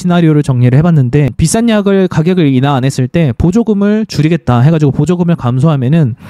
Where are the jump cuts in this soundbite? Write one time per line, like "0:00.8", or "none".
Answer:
0:01.3